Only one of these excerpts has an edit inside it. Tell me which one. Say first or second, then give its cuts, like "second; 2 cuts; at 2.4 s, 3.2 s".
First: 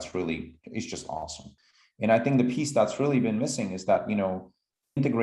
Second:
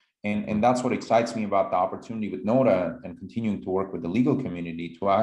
first; 1 cut; at 1.4 s